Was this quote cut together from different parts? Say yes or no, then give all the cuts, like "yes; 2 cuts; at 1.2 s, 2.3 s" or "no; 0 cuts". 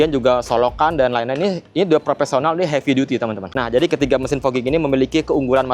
yes; 1 cut; at 3.5 s